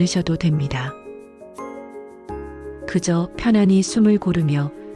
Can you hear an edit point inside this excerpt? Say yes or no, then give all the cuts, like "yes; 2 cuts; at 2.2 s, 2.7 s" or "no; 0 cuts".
yes; 2 cuts; at 0.9 s, 2.9 s